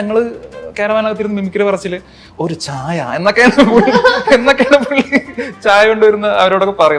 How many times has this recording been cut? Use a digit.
0